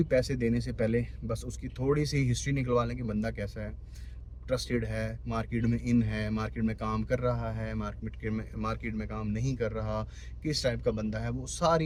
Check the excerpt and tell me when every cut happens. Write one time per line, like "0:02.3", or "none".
none